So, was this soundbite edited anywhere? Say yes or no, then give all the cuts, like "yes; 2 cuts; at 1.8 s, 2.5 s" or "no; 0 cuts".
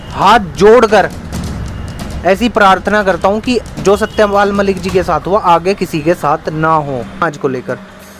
yes; 1 cut; at 7.2 s